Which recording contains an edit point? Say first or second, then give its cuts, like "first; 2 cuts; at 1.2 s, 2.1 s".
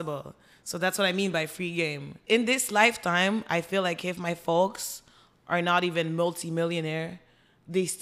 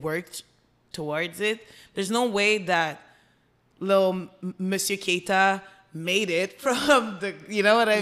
first; 1 cut; at 2.1 s